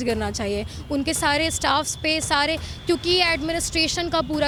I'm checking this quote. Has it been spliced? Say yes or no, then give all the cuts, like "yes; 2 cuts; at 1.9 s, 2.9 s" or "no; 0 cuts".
no; 0 cuts